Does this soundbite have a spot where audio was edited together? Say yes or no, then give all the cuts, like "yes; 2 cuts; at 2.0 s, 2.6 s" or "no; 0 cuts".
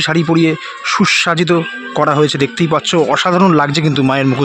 no; 0 cuts